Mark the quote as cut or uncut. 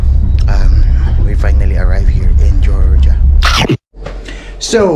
cut